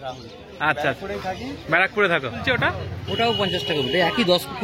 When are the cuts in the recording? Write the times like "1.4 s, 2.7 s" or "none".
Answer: 2.4 s